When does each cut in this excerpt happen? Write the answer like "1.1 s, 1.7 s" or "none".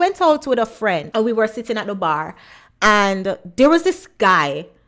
1.1 s